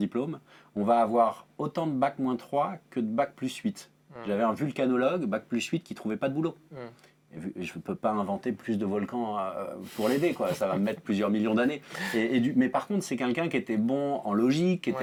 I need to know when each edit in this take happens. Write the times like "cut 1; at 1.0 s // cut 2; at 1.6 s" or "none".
none